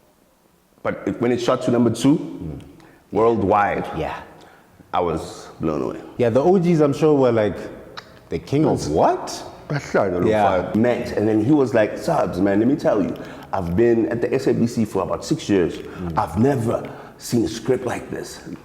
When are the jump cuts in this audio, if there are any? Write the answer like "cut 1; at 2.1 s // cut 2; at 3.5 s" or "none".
cut 1; at 6.0 s // cut 2; at 10.7 s